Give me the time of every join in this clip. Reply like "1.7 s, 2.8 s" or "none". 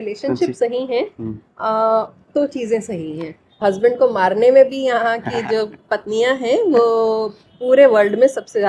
3.6 s